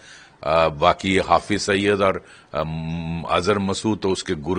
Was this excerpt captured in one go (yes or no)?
yes